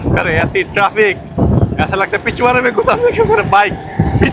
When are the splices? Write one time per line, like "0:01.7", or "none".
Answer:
none